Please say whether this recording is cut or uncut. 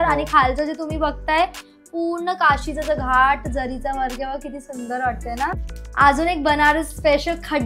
cut